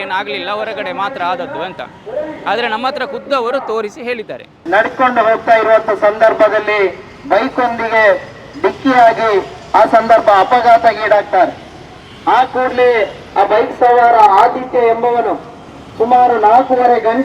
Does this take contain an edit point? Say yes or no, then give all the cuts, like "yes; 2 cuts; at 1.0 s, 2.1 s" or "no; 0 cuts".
no; 0 cuts